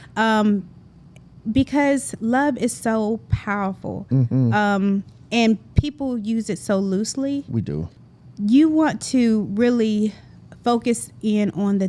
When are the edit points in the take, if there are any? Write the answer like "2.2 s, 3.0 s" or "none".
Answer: 8.0 s